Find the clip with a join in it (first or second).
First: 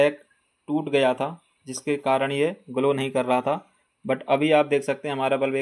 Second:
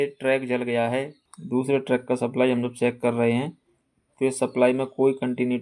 second